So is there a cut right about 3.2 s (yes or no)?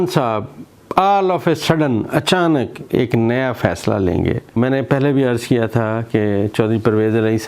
no